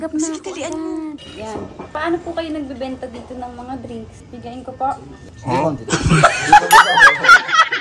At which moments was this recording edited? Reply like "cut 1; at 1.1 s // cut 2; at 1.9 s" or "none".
cut 1; at 1.3 s // cut 2; at 4.2 s // cut 3; at 5.7 s